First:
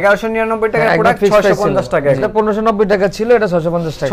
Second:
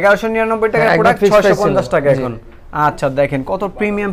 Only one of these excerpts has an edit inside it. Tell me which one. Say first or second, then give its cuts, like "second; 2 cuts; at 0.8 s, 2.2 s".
first; 1 cut; at 2.3 s